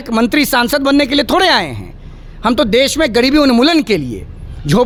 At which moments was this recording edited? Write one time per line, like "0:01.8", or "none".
none